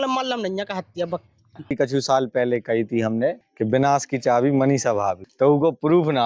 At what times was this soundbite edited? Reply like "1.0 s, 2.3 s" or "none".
1.5 s, 3.5 s, 5.2 s